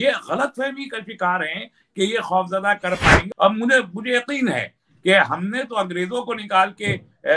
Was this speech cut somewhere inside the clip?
yes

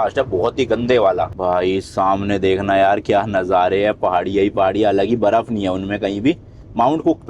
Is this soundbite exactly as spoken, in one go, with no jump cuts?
no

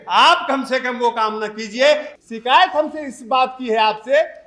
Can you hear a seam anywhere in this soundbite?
yes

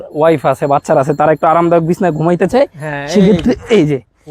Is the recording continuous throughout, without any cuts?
yes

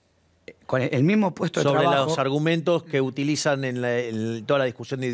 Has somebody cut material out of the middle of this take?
no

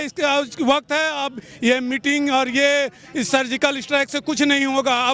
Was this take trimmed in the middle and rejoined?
no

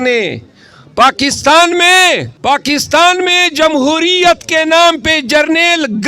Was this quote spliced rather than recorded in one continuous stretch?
yes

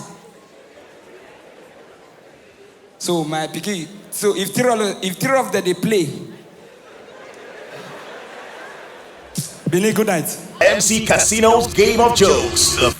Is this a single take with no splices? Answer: no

